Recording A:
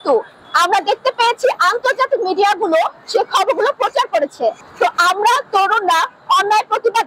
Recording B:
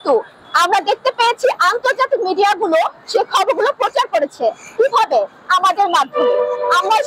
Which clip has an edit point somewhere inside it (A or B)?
A